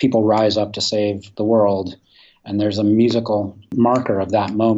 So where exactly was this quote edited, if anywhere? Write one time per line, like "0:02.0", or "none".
0:01.3
0:03.6